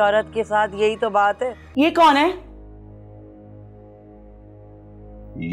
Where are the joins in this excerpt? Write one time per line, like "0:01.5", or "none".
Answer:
0:01.6